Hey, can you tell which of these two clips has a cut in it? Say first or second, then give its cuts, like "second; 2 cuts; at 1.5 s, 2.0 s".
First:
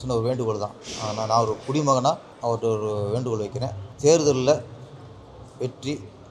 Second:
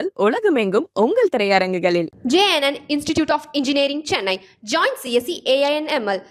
first; 2 cuts; at 2.3 s, 3.8 s